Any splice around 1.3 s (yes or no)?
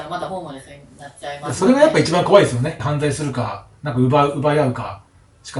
no